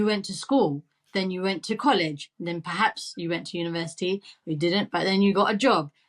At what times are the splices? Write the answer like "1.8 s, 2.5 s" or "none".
none